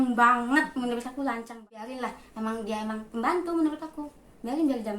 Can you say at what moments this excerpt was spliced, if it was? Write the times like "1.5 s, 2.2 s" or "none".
1.7 s